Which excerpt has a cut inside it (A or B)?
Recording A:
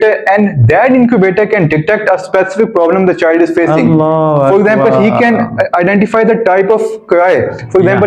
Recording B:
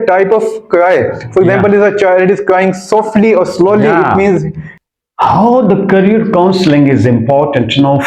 B